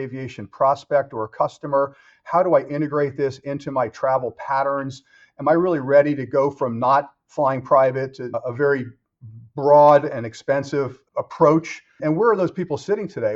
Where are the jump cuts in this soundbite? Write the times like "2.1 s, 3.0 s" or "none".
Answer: 8.3 s, 11.9 s